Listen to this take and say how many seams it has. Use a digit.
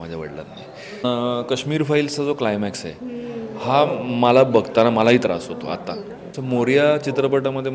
2